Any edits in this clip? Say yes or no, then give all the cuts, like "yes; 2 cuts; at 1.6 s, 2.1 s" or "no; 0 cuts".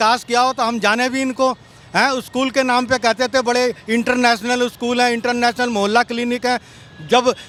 no; 0 cuts